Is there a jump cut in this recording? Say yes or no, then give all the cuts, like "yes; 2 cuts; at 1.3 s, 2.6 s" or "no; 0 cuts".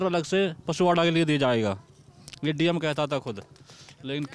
no; 0 cuts